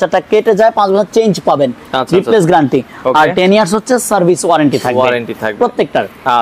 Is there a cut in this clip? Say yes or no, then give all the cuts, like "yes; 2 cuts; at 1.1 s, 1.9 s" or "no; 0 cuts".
no; 0 cuts